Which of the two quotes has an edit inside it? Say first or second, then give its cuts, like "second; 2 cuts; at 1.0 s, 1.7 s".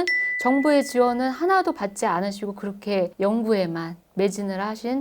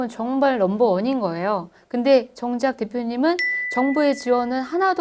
first; 1 cut; at 3.1 s